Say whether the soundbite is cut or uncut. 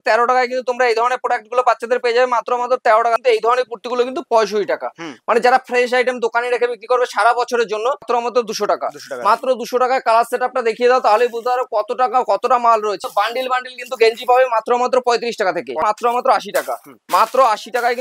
cut